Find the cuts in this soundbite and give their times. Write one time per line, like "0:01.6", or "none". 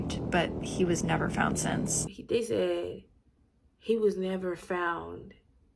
0:02.1